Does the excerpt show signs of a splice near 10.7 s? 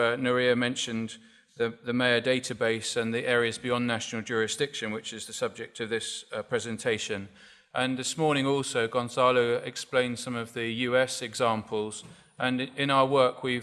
yes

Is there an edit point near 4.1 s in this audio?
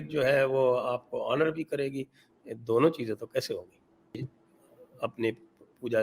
yes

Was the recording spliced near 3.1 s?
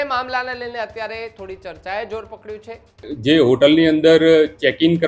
yes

